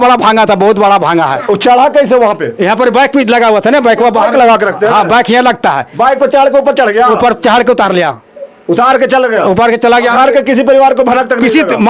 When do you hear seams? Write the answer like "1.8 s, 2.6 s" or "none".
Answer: none